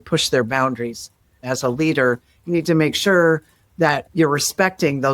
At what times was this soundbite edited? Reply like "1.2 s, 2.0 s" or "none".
1.5 s, 4.1 s